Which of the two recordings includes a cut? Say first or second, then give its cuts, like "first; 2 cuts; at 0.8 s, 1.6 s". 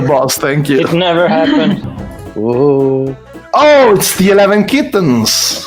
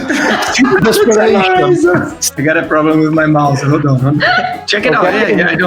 second; 2 cuts; at 2.2 s, 4.6 s